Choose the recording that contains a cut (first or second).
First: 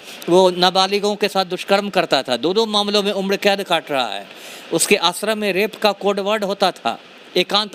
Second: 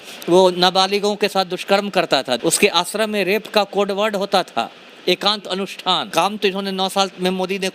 second